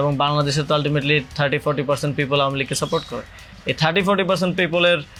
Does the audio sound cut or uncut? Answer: uncut